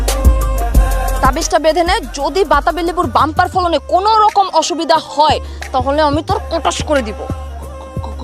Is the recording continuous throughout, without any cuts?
no; 1 cut; at 1.1 s

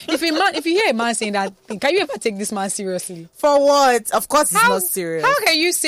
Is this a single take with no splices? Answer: yes; 0 cuts

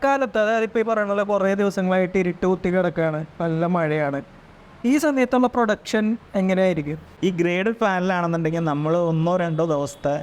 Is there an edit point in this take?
yes; 1 cut; at 7.0 s

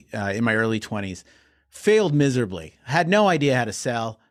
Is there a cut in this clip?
no; 0 cuts

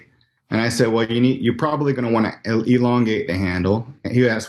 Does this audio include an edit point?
no; 0 cuts

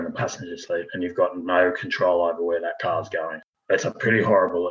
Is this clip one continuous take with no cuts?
yes; 0 cuts

